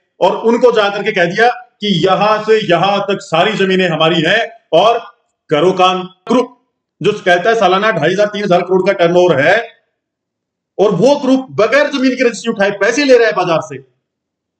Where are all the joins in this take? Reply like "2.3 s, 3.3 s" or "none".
6.3 s